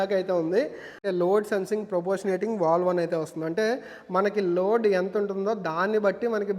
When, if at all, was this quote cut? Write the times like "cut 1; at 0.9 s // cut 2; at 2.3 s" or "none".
cut 1; at 1.0 s